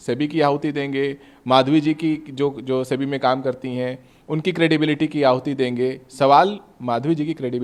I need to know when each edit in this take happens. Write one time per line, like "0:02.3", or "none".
none